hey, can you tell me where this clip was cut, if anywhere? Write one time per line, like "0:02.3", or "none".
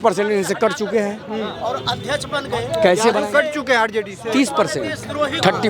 none